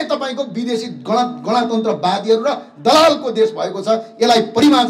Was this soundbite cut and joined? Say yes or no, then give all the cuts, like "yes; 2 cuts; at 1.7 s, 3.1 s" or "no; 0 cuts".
no; 0 cuts